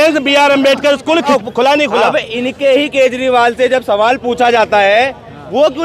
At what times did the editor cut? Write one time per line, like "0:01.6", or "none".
0:01.3